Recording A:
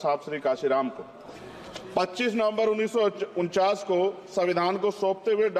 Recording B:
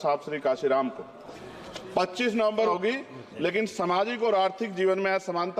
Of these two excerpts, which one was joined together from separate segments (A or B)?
B